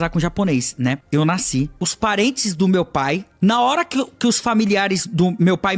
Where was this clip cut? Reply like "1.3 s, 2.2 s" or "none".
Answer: 1.0 s, 1.7 s, 3.3 s